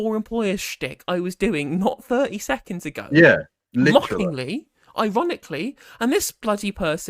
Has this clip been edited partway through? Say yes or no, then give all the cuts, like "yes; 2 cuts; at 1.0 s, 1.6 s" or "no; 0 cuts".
no; 0 cuts